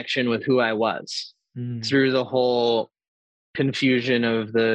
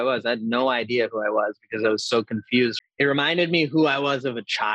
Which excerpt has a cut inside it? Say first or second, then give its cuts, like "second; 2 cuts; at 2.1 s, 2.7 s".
second; 1 cut; at 2.8 s